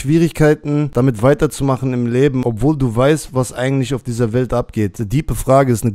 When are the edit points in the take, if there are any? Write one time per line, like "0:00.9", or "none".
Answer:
0:00.9
0:02.4
0:05.0